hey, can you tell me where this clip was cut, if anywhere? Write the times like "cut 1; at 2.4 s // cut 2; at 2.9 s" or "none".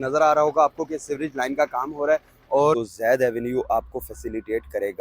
cut 1; at 2.7 s

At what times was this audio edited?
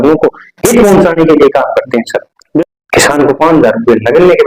cut 1; at 2.3 s

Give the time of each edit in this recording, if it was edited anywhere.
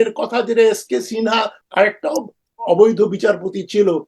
cut 1; at 1.6 s

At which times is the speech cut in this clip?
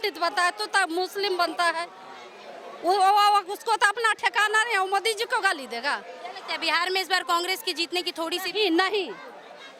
none

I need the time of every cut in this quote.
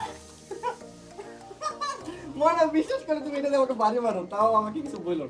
none

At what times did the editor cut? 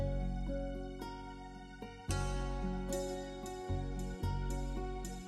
none

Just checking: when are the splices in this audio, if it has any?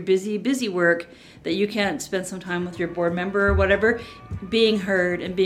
cut 1; at 2.7 s // cut 2; at 4.1 s

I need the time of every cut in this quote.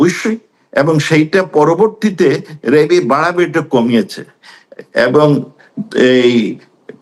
none

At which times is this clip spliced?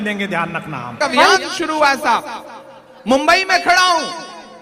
cut 1; at 1.3 s

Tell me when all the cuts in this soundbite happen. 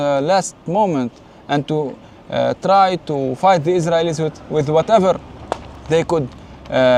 none

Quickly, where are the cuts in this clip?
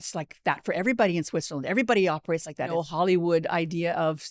cut 1; at 2.7 s

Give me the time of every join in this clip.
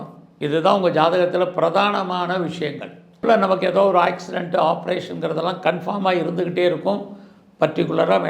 cut 1; at 3.2 s

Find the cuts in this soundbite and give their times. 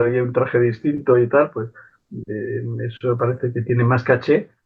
none

